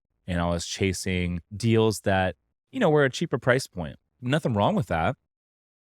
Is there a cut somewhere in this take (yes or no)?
yes